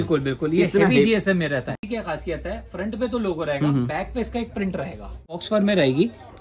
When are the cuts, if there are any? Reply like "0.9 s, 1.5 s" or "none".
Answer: 1.7 s, 5.4 s

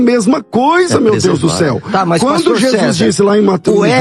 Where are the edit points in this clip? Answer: none

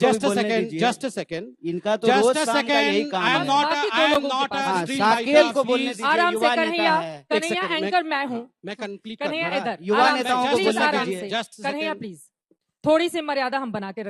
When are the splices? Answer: none

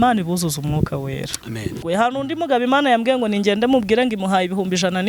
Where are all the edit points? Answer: 1.8 s

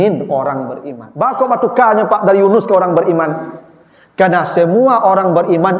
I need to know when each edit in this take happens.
1.3 s

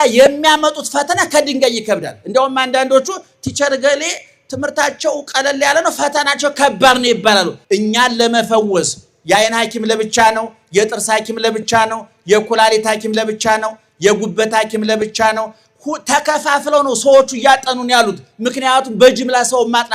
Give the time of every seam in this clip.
7.6 s

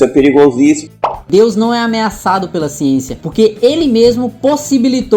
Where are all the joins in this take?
0.9 s

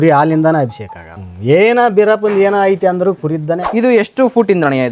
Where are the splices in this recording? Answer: 1.1 s, 3.6 s

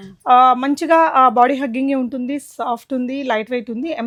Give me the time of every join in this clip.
none

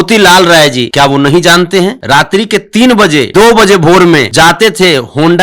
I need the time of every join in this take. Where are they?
0.8 s, 2.0 s, 3.3 s, 4.3 s

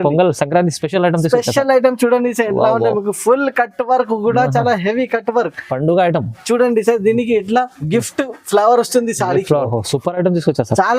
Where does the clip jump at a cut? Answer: 9.7 s

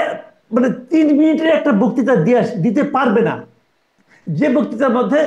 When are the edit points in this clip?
none

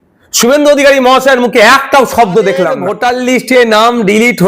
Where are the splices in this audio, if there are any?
2.9 s

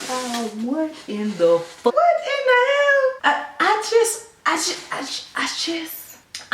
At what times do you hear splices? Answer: 1.7 s

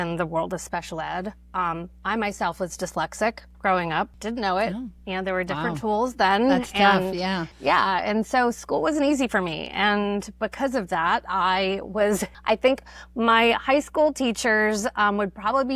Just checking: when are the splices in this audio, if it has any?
4.2 s, 7.5 s, 12.3 s

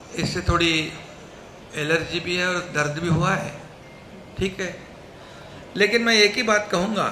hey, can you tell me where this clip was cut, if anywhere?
none

